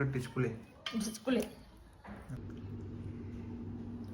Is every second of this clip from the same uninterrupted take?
no; 1 cut; at 2.4 s

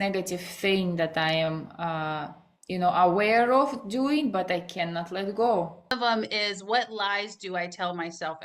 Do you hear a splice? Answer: yes; 1 cut; at 5.9 s

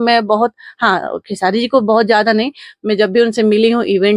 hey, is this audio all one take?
yes; 0 cuts

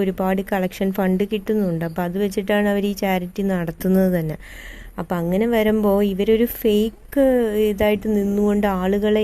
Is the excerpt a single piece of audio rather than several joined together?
no; 1 cut; at 7.5 s

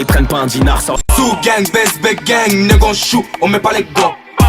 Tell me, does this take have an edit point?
yes; 1 cut; at 1.0 s

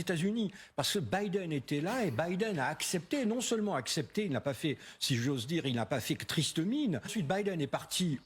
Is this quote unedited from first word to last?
no; 1 cut; at 7.1 s

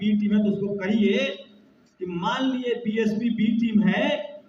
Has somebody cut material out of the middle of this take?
no; 0 cuts

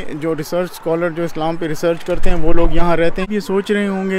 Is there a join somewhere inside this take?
yes; 1 cut; at 3.3 s

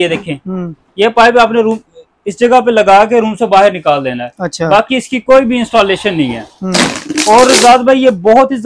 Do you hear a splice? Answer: no; 0 cuts

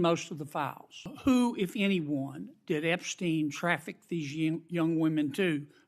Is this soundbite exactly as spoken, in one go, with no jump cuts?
no; 1 cut; at 1.1 s

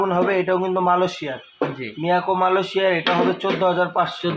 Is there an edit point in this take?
no; 0 cuts

